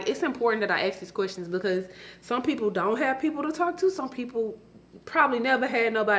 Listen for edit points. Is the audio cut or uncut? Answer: uncut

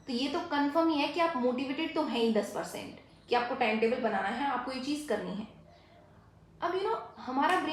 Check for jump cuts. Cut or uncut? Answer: uncut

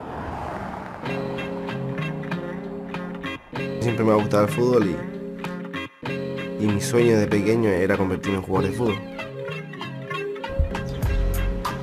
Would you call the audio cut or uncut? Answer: uncut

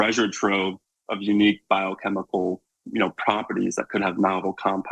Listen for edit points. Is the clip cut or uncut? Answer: uncut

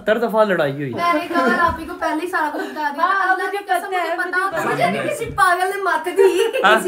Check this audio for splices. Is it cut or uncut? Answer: cut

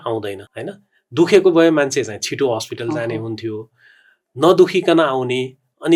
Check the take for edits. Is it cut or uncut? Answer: uncut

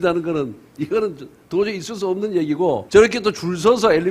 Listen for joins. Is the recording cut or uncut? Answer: cut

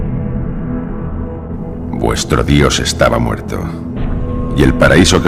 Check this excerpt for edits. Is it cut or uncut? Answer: uncut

